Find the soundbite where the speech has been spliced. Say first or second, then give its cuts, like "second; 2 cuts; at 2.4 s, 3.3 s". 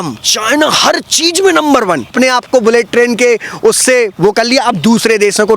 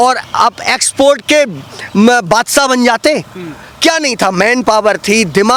first; 1 cut; at 2.1 s